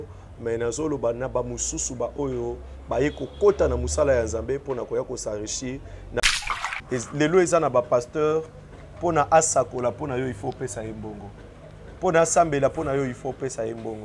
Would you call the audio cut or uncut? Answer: cut